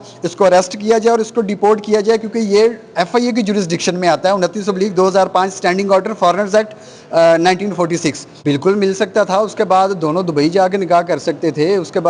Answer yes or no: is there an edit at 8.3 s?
yes